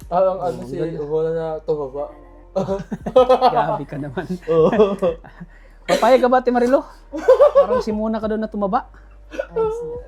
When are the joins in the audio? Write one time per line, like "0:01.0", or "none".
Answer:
none